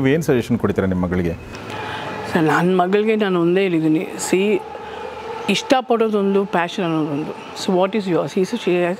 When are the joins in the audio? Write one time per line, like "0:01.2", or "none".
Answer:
none